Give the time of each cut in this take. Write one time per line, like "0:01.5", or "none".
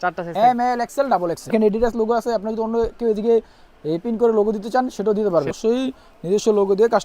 0:01.5
0:05.5